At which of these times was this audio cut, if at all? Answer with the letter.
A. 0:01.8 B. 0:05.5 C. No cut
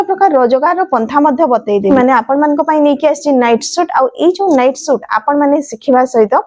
A